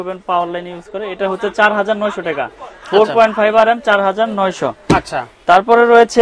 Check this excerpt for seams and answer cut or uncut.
uncut